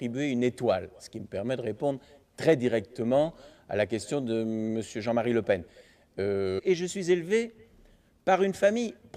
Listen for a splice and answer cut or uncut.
uncut